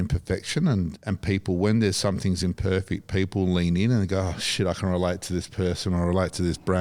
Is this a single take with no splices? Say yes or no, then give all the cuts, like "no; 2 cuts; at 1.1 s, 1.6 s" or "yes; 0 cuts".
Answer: yes; 0 cuts